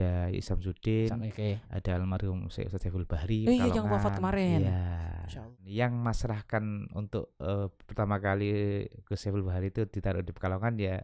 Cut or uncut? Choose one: cut